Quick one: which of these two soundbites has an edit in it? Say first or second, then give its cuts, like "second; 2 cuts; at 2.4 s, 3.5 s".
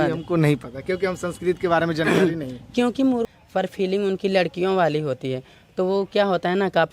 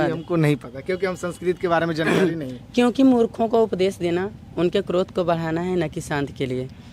first; 1 cut; at 3.3 s